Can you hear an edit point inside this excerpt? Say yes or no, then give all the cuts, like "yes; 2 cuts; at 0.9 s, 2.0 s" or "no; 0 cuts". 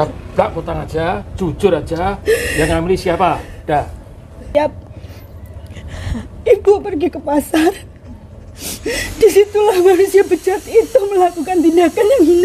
yes; 1 cut; at 4.5 s